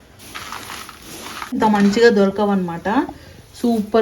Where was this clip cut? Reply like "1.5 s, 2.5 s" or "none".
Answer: 1.6 s